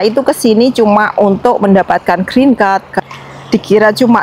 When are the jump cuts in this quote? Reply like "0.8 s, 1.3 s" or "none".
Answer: 2.9 s